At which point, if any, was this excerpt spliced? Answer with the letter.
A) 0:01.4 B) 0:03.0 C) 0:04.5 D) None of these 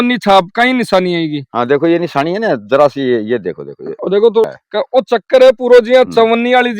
C